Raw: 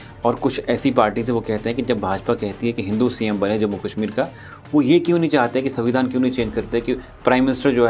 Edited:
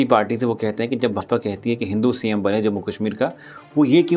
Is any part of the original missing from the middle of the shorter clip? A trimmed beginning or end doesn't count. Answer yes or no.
yes